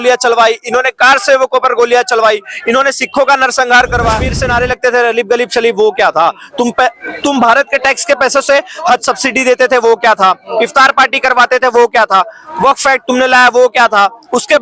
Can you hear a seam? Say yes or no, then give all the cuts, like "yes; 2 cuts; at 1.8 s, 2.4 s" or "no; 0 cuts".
yes; 1 cut; at 4.3 s